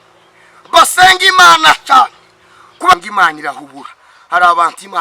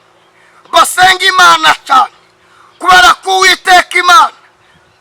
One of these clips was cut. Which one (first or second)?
first